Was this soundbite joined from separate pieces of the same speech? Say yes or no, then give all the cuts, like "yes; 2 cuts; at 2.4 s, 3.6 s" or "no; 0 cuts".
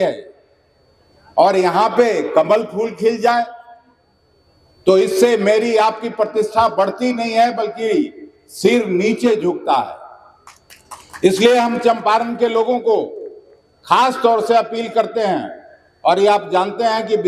no; 0 cuts